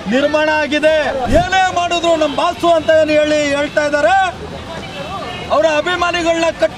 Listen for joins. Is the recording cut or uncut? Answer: cut